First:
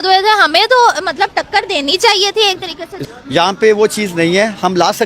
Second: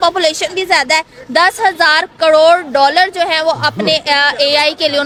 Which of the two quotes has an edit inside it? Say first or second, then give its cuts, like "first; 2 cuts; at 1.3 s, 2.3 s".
first; 1 cut; at 3.0 s